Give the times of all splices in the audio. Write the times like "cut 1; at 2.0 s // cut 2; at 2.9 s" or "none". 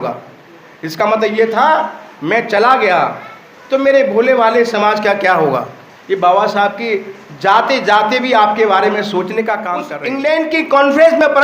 cut 1; at 10.0 s